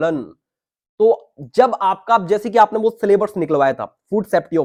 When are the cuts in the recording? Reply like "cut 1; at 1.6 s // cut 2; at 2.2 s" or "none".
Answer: none